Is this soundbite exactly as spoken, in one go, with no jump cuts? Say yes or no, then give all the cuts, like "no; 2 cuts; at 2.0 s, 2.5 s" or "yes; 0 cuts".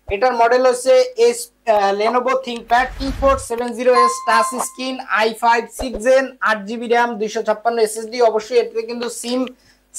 yes; 0 cuts